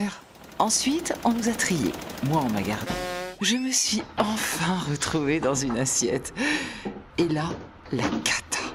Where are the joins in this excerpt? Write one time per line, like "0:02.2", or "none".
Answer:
none

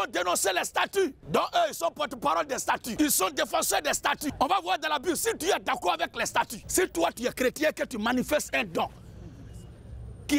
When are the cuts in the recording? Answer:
0:01.2
0:02.9
0:04.3
0:06.6

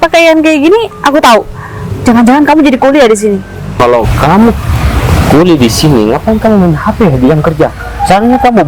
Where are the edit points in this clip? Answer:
0:03.8

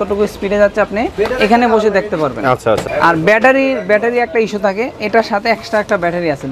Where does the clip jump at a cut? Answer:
0:02.8

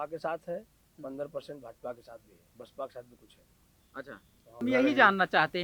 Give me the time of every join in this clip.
0:04.6

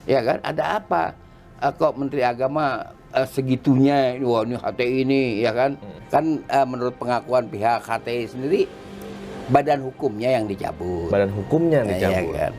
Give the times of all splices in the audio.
0:05.9

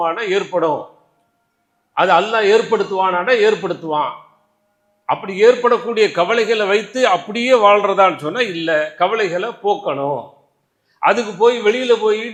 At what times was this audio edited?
none

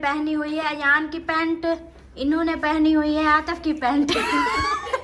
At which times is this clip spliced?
none

